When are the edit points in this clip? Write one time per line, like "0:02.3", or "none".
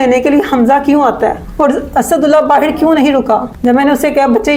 none